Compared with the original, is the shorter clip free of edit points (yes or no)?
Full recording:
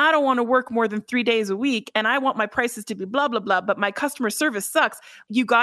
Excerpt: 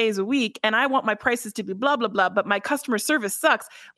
yes